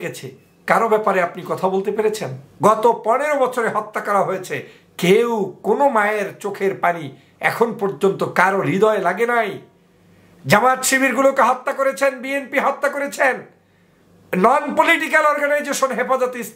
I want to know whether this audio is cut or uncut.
cut